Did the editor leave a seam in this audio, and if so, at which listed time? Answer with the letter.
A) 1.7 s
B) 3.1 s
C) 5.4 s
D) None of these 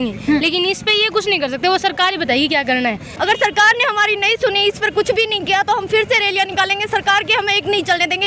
B